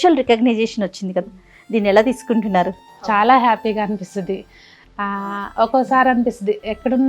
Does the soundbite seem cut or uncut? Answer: cut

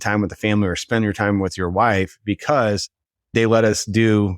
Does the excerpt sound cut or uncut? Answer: cut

